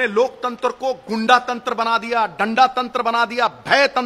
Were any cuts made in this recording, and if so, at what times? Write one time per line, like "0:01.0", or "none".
none